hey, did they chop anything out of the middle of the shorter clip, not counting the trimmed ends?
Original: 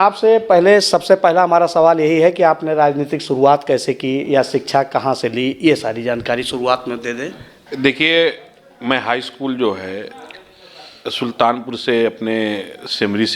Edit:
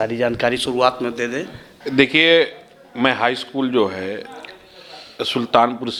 no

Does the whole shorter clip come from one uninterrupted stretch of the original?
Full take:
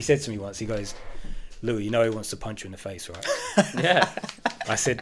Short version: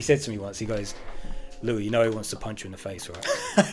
yes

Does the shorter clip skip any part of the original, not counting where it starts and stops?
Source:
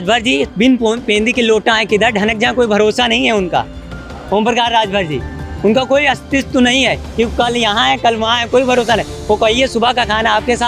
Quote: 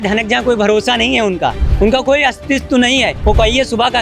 yes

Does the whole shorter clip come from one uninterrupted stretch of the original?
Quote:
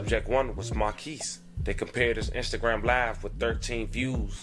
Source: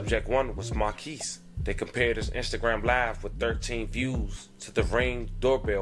yes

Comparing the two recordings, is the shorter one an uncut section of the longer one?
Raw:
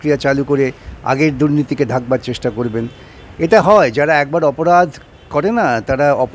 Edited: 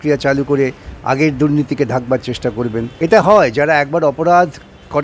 no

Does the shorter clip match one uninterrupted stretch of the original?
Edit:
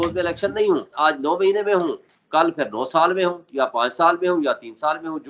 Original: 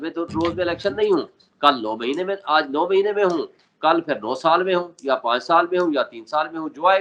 no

